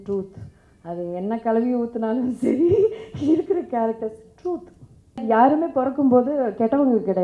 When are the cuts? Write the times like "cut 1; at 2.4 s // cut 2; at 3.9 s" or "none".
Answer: cut 1; at 5.2 s